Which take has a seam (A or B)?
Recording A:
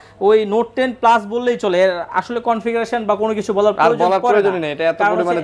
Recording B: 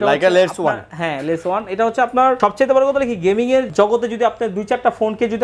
B